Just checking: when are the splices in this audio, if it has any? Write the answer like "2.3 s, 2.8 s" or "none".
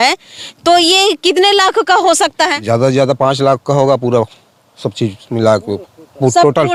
none